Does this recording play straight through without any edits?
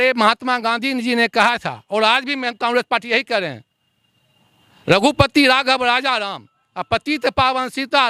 yes; 0 cuts

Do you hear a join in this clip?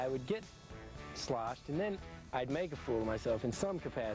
no; 0 cuts

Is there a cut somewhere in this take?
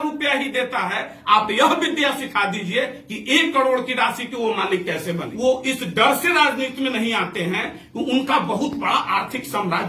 yes; 1 cut; at 5.3 s

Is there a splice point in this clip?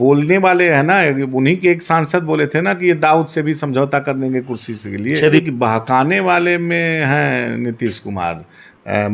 yes; 1 cut; at 5.4 s

